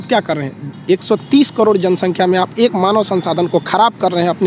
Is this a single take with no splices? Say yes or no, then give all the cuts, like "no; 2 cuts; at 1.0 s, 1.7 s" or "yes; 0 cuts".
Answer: yes; 0 cuts